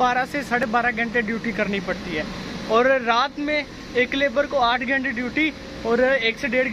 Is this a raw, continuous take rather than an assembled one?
yes; 0 cuts

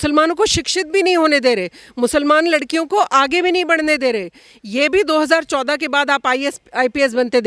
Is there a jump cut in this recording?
no; 0 cuts

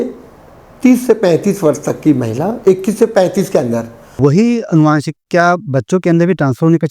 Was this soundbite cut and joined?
yes; 1 cut; at 4.0 s

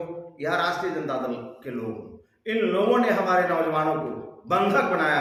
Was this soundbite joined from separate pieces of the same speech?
no; 0 cuts

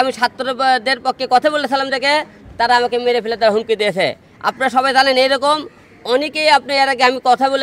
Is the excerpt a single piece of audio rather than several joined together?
yes; 0 cuts

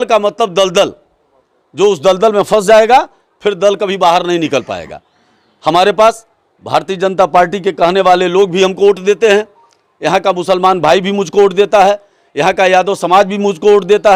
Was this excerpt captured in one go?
yes; 0 cuts

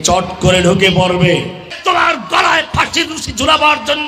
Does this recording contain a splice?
yes; 1 cut; at 1.7 s

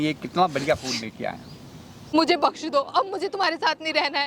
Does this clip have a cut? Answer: yes; 1 cut; at 2.1 s

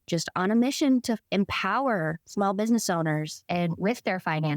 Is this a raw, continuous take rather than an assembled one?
no; 3 cuts; at 1.2 s, 2.2 s, 3.4 s

